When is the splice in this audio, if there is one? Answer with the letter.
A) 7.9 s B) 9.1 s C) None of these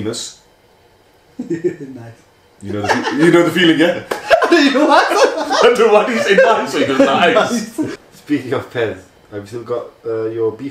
A